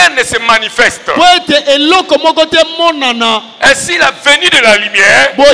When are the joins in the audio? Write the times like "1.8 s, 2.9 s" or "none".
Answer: none